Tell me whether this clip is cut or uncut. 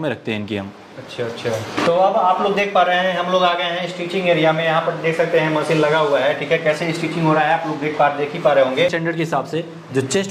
cut